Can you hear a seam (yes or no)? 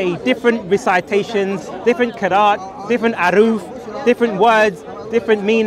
no